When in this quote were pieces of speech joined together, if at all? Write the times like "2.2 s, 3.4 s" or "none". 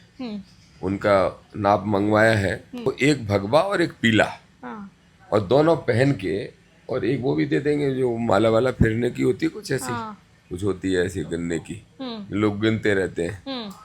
2.9 s